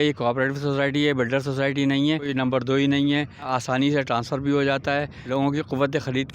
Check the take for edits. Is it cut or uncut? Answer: cut